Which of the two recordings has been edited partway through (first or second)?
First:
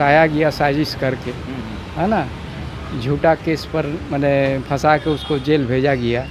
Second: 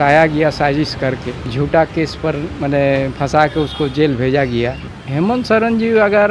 second